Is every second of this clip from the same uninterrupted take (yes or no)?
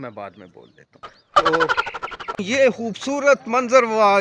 no